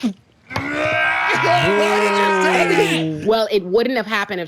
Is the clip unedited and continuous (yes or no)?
no